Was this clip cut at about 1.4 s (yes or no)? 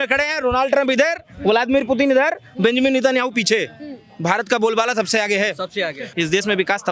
no